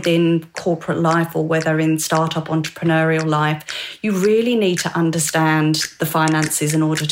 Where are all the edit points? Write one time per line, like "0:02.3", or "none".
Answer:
none